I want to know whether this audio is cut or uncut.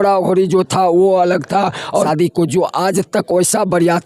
cut